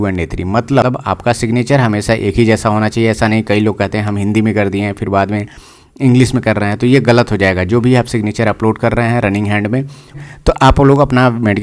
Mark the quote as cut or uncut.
cut